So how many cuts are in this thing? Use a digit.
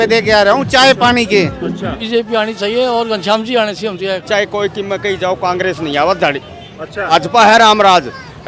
3